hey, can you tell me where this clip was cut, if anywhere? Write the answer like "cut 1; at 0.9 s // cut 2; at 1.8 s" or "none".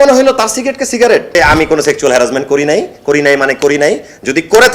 cut 1; at 1.4 s

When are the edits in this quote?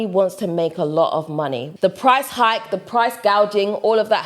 cut 1; at 1.6 s

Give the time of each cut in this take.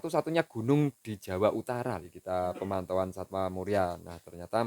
cut 1; at 2.1 s

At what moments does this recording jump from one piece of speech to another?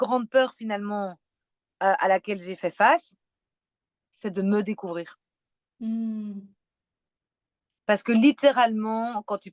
none

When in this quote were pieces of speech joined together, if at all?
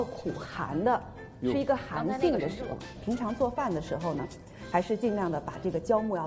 cut 1; at 2.9 s

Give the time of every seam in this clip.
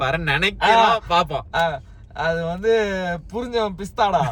none

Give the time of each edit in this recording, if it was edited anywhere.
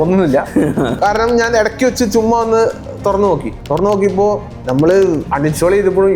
cut 1; at 1.0 s // cut 2; at 5.2 s

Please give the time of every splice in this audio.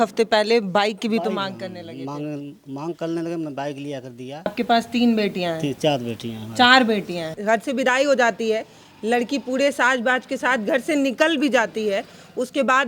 cut 1; at 4.5 s // cut 2; at 7.4 s

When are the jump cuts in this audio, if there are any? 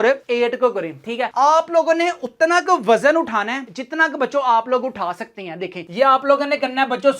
cut 1; at 1.3 s // cut 2; at 5.8 s

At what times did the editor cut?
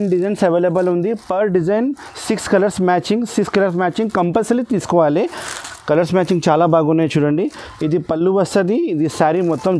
none

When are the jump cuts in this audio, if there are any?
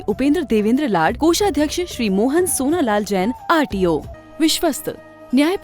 cut 1; at 4.1 s

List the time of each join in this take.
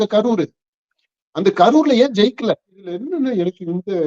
cut 1; at 2.9 s

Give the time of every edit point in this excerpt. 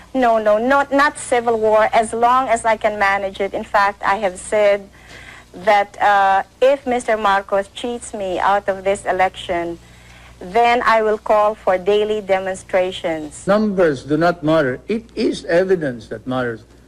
cut 1; at 13.3 s

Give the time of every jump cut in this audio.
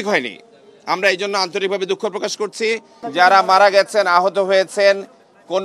cut 1; at 3.0 s

